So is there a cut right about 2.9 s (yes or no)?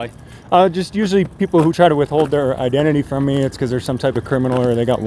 no